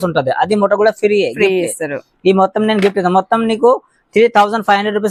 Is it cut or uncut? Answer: uncut